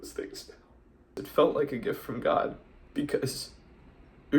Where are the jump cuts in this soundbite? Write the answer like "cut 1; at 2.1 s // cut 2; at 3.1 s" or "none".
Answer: cut 1; at 1.2 s // cut 2; at 2.7 s